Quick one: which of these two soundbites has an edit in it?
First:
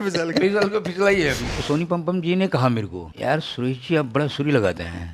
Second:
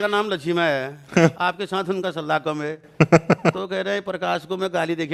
first; 2 cuts; at 1.5 s, 3.0 s

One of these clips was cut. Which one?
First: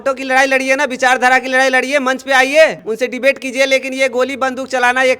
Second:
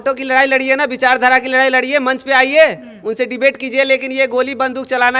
first; 1 cut; at 2.8 s

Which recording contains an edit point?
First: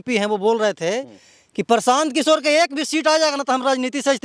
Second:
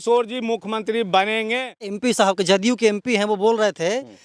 second; 1 cut; at 2.0 s

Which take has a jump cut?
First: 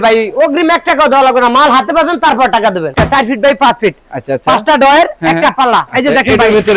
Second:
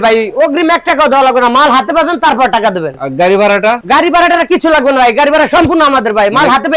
first; 2 cuts; at 2.9 s, 5.9 s

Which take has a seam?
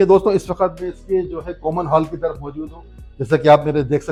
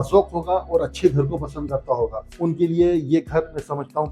second; 1 cut; at 2.2 s

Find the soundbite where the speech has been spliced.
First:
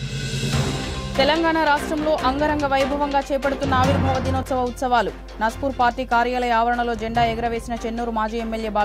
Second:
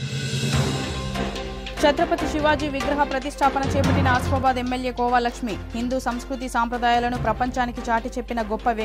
first; 1 cut; at 0.9 s

